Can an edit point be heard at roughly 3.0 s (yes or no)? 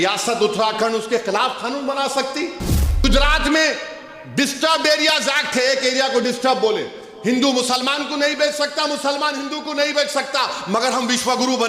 yes